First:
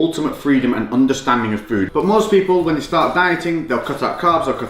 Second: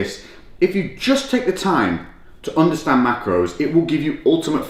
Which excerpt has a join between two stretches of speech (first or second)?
first